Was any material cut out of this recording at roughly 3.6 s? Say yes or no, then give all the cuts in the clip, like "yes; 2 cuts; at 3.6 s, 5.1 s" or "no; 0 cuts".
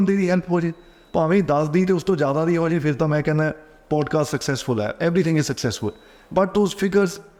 no; 0 cuts